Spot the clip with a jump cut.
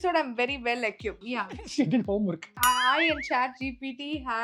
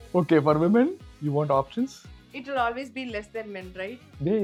first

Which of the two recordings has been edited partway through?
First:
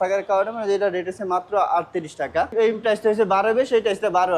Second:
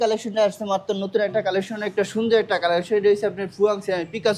first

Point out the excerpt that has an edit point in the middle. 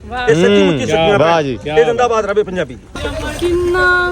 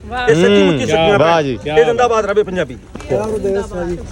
first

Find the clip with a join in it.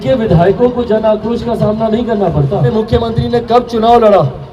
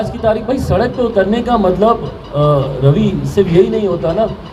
first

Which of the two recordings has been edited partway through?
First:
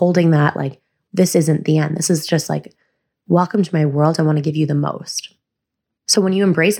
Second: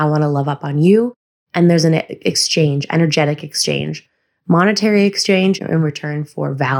second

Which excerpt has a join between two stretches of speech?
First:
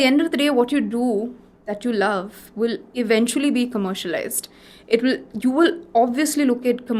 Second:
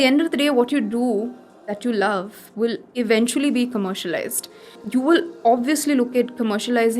second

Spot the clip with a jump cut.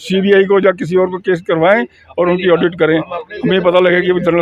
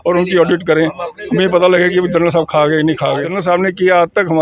second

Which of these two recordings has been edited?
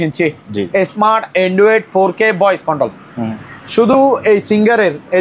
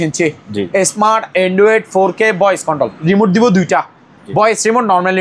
second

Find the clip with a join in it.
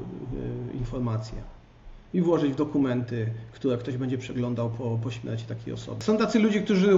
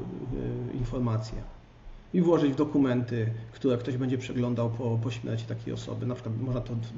first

